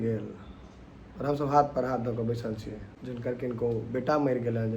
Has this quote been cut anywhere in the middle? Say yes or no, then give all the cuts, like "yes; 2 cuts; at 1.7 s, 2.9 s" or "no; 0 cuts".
yes; 1 cut; at 2.9 s